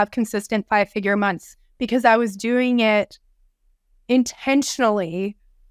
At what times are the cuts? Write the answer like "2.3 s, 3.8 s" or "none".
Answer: none

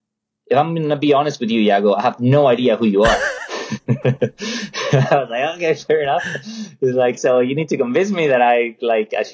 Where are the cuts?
none

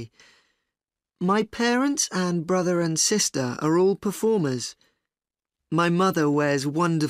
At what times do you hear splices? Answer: 2.1 s

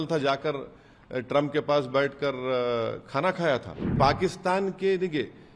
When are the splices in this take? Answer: 4.0 s

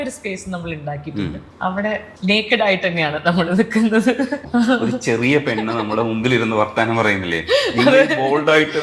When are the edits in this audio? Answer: 4.4 s

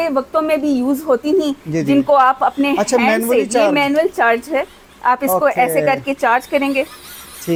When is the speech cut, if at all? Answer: none

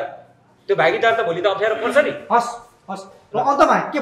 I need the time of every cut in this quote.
none

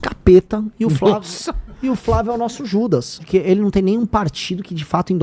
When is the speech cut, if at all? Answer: 3.2 s

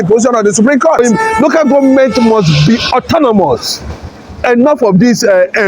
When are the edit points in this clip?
1.0 s

